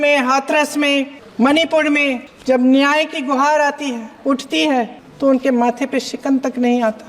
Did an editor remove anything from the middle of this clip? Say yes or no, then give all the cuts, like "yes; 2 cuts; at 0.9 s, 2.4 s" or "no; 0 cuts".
yes; 4 cuts; at 1.2 s, 2.3 s, 4.1 s, 5.0 s